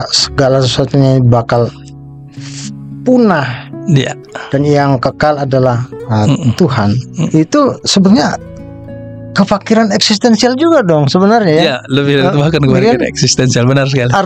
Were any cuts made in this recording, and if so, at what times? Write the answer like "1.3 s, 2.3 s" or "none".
7.3 s